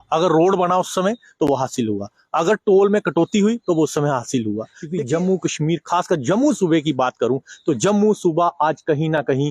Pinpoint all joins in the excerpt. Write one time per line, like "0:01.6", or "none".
0:04.8